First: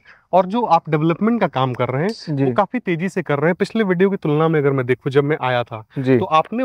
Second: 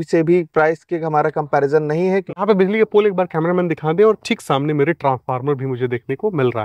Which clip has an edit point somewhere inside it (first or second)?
second